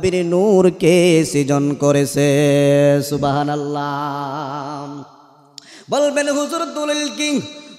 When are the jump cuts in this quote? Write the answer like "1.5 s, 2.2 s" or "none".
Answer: none